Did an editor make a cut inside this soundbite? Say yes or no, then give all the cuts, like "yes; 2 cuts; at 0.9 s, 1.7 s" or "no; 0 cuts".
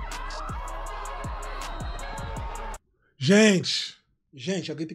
no; 0 cuts